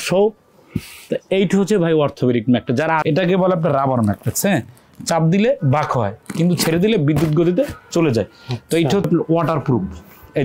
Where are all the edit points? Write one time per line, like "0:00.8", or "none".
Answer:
0:03.0
0:09.1